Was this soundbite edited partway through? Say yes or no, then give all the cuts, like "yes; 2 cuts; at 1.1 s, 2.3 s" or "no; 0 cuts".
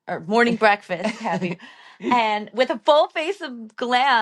no; 0 cuts